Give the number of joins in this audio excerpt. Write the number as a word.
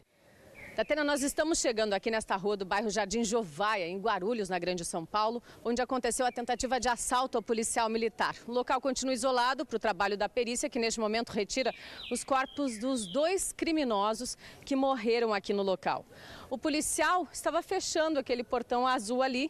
zero